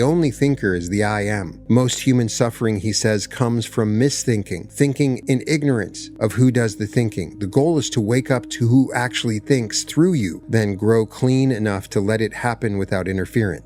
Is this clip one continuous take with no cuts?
no; 5 cuts; at 1.5 s, 4.7 s, 5.2 s, 6.0 s, 10.4 s

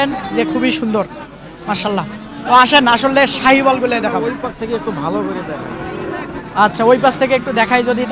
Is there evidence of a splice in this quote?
no; 0 cuts

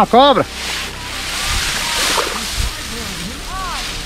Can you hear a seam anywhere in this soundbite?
no; 0 cuts

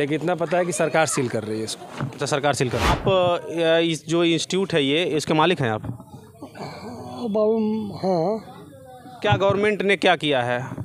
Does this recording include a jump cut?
yes; 1 cut; at 2.9 s

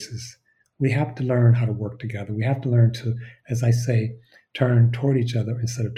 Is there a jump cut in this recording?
no; 0 cuts

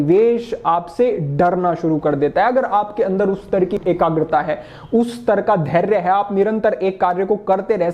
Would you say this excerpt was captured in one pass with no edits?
yes; 0 cuts

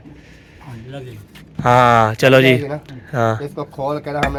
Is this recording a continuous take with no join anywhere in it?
yes; 0 cuts

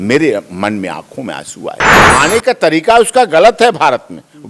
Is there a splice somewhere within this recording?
yes; 1 cut; at 1.9 s

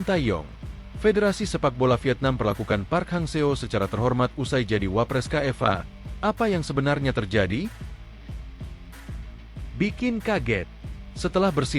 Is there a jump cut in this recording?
yes; 2 cuts; at 8.2 s, 9.8 s

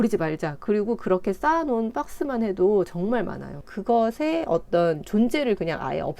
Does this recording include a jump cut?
yes; 1 cut; at 3.7 s

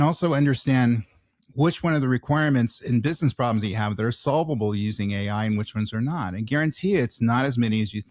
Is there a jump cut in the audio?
no; 0 cuts

